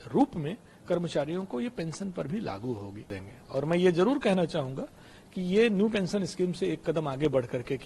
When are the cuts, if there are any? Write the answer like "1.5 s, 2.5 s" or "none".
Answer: 3.2 s